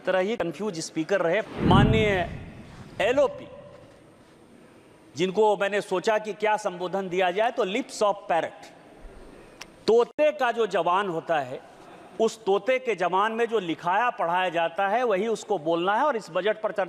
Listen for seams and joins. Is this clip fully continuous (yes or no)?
no